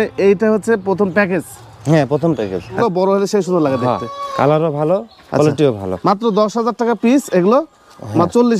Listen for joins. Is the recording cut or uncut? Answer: cut